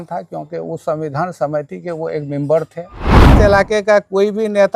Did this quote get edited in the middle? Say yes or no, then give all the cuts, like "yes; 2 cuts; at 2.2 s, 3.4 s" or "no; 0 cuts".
yes; 1 cut; at 3.3 s